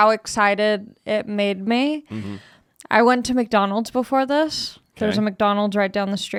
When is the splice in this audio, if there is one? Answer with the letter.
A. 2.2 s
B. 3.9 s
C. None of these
C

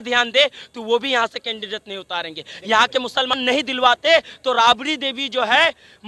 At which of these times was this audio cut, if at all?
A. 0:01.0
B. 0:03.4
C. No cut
B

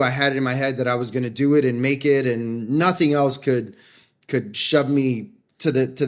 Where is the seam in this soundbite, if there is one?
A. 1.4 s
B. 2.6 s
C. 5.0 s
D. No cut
D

